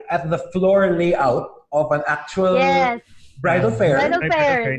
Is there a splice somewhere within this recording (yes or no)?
no